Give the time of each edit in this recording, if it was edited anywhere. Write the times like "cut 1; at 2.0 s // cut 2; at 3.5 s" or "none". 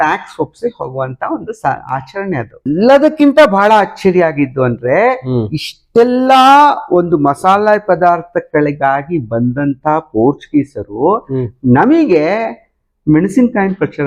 cut 1; at 2.7 s